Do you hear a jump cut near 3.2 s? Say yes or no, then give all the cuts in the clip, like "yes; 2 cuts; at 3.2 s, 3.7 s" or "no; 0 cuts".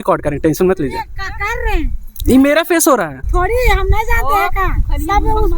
yes; 1 cut; at 3.2 s